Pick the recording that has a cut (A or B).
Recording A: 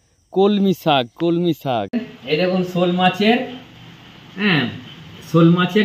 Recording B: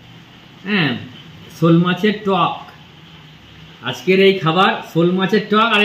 A